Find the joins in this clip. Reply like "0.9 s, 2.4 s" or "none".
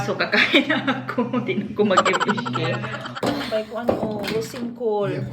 3.1 s